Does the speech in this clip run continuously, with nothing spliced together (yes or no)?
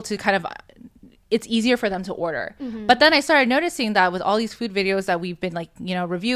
yes